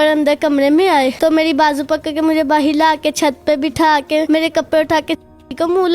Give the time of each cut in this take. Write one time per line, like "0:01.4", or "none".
0:01.1
0:04.2